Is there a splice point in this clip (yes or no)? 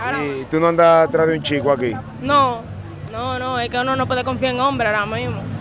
yes